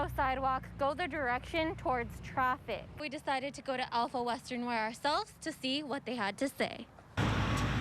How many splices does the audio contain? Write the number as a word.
one